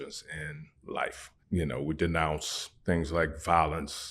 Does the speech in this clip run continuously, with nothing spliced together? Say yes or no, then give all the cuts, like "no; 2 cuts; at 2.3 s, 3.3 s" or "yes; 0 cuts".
no; 1 cut; at 1.3 s